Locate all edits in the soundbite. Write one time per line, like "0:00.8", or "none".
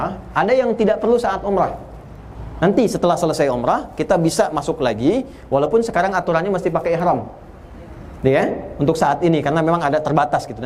none